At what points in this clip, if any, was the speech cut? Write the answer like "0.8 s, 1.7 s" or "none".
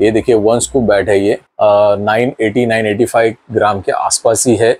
1.5 s